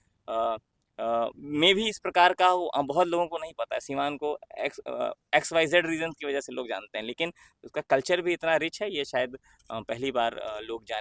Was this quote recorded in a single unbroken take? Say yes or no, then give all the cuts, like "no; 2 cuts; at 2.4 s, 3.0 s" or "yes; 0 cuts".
yes; 0 cuts